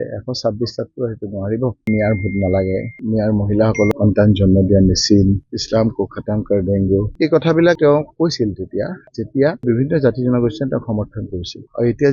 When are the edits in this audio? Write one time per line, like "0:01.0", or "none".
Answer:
0:01.9
0:03.9
0:07.1